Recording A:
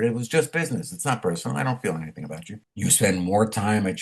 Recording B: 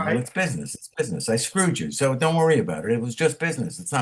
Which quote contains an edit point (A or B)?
A